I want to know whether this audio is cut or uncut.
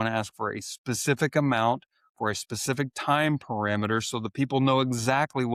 uncut